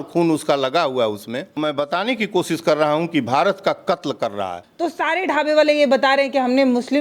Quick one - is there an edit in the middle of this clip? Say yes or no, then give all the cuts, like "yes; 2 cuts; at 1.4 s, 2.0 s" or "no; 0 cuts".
yes; 2 cuts; at 1.6 s, 4.7 s